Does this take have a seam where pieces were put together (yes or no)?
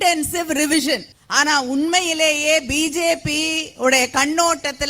yes